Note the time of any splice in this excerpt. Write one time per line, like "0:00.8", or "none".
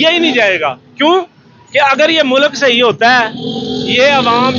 none